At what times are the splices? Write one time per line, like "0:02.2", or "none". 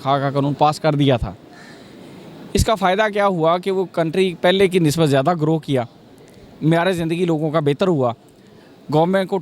none